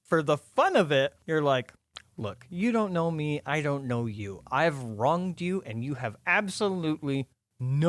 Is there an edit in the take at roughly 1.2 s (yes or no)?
yes